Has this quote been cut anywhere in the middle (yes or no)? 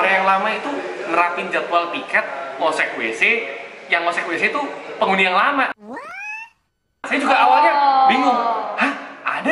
no